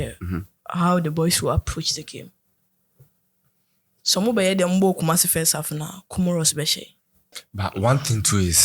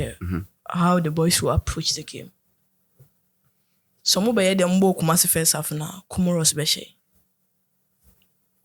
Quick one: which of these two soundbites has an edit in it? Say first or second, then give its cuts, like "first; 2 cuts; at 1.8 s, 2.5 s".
first; 1 cut; at 7.4 s